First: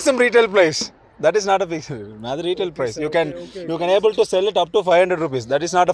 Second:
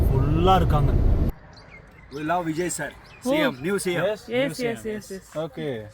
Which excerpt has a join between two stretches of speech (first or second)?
second